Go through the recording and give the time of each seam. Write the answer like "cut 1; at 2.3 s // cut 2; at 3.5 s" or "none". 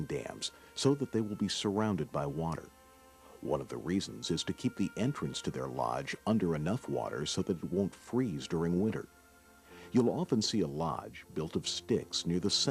cut 1; at 1.1 s